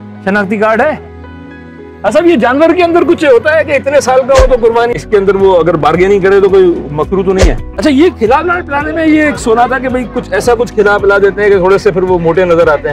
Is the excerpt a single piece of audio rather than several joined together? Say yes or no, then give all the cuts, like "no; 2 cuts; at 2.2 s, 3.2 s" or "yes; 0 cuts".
no; 2 cuts; at 4.9 s, 7.7 s